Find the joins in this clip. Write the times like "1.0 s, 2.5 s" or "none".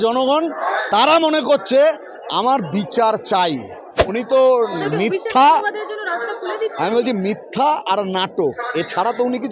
3.9 s

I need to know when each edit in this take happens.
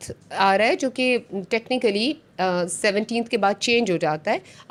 none

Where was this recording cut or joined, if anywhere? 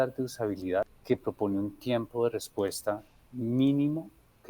1.0 s

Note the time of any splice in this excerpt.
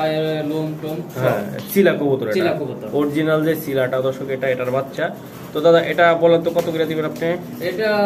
none

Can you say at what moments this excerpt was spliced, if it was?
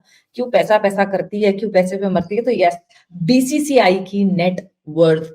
none

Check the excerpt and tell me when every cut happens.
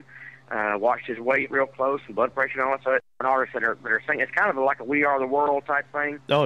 3.2 s

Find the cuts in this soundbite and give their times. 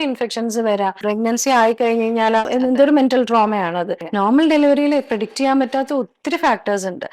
1.0 s, 2.4 s, 4.0 s

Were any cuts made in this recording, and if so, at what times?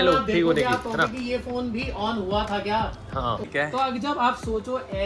3.4 s

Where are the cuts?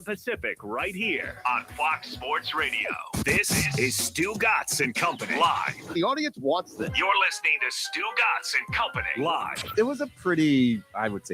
3.0 s

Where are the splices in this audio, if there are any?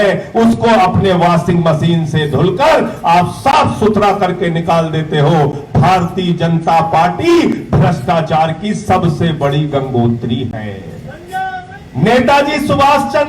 11.7 s

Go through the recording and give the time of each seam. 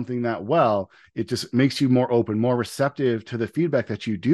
1.0 s

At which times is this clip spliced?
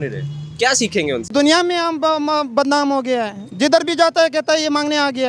1.3 s

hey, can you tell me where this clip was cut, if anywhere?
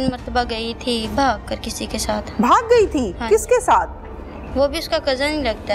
none

